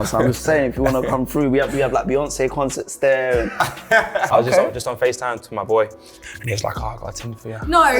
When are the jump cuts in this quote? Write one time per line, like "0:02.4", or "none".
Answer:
0:04.2